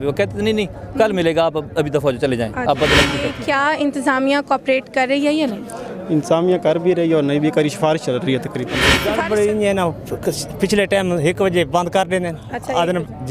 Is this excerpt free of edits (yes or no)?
no